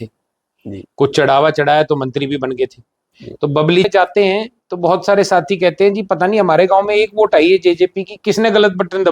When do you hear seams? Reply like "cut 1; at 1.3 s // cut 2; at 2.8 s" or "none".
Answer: cut 1; at 3.9 s